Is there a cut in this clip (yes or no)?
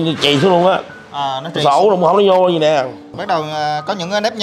yes